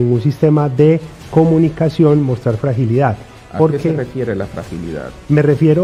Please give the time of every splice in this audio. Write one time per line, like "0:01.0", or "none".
none